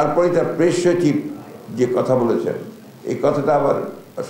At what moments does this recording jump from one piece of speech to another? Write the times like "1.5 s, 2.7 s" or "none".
none